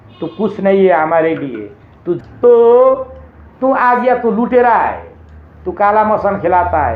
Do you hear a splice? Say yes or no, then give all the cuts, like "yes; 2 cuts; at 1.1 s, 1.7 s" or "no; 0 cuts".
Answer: yes; 1 cut; at 2.2 s